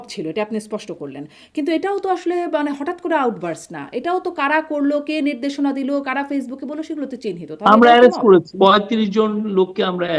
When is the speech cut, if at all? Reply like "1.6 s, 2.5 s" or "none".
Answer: 8.5 s